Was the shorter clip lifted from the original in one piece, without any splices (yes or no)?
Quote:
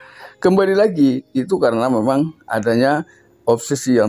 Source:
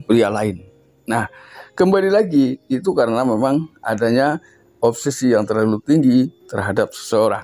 yes